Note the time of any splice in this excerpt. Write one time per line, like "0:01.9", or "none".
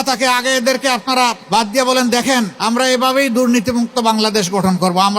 0:01.4
0:02.5